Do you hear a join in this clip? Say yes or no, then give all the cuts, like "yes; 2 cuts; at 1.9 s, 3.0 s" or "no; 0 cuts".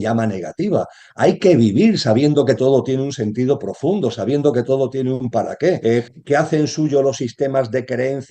yes; 1 cut; at 5.8 s